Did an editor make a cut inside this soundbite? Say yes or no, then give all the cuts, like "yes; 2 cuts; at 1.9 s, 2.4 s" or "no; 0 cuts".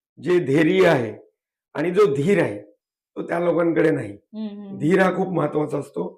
no; 0 cuts